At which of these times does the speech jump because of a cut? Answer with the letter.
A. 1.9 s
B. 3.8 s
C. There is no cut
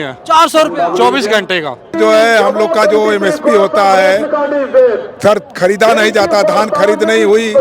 A